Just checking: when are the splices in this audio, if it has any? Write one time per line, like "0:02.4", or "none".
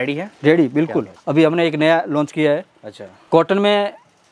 0:01.2